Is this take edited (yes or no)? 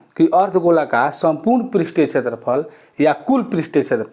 no